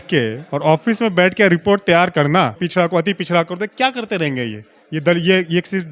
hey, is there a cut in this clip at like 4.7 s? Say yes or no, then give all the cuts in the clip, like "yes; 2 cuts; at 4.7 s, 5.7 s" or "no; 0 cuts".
no; 1 cut; at 2.6 s